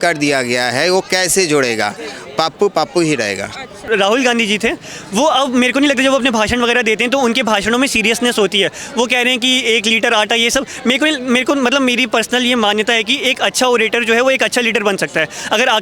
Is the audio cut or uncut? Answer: cut